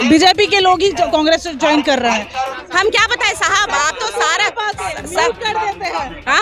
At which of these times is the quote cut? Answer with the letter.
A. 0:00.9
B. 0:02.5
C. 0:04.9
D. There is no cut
B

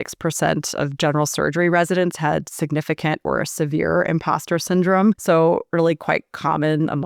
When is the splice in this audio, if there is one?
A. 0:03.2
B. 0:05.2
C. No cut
B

